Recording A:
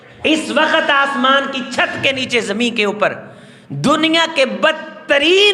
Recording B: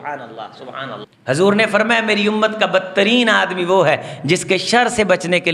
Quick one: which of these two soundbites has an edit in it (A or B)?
B